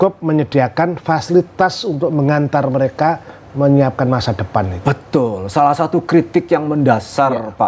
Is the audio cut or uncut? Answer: uncut